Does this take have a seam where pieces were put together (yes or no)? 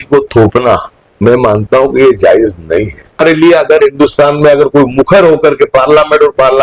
yes